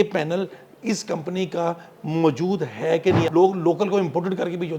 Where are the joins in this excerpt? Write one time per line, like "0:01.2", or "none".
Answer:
0:03.3

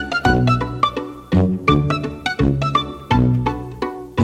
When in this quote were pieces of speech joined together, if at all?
0:01.2

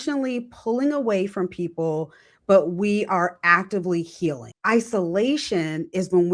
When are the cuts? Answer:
0:04.5

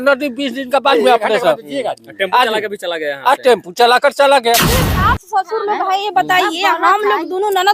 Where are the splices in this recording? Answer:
0:04.7

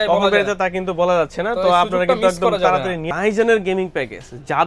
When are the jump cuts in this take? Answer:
0:03.1

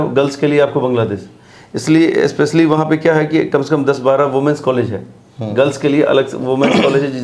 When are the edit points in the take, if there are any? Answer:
none

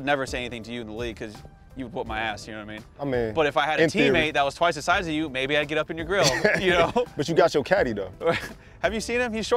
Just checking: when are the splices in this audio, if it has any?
none

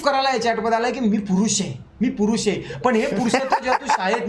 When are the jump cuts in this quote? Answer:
none

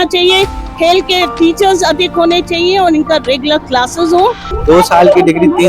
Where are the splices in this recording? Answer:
0:04.5

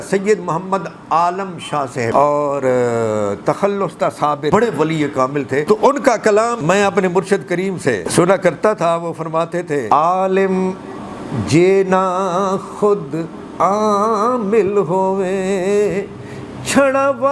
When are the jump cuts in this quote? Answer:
0:02.1
0:04.5
0:05.7
0:06.6
0:08.1
0:09.8

